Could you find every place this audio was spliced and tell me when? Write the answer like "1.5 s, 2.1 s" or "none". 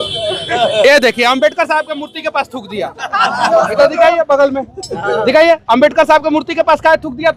none